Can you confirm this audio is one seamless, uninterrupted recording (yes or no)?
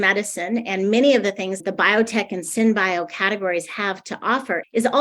no